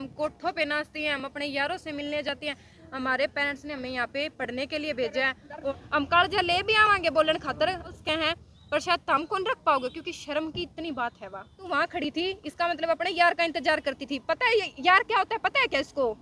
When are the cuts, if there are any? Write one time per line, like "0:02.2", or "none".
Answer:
0:05.7
0:08.0
0:11.6